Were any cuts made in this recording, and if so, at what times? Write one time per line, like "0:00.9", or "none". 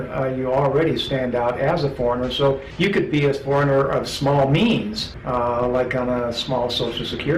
none